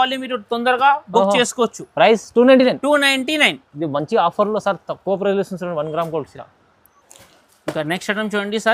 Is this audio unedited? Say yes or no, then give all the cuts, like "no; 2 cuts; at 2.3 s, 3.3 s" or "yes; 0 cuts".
yes; 0 cuts